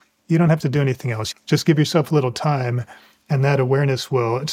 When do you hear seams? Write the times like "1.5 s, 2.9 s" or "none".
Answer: 1.2 s